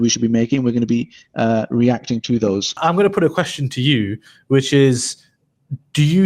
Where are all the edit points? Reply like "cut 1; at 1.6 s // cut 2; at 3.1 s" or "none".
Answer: cut 1; at 2.8 s